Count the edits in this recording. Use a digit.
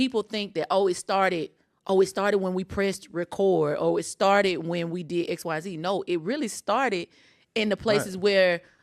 0